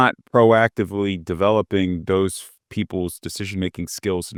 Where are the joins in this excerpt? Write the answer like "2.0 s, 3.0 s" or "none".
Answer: none